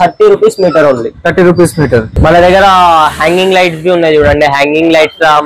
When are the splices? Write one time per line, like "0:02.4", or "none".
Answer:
0:02.1